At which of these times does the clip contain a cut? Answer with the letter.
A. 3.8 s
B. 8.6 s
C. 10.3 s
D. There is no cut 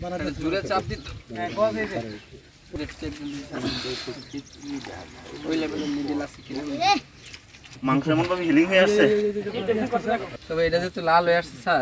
C